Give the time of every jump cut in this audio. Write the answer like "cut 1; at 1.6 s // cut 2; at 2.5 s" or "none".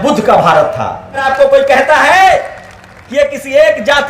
cut 1; at 1.2 s